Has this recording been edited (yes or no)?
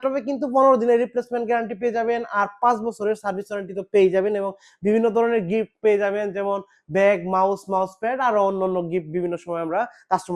no